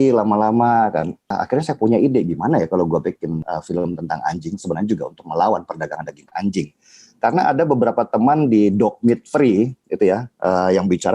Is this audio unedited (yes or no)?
no